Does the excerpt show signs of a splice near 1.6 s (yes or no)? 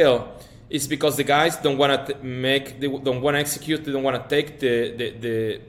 no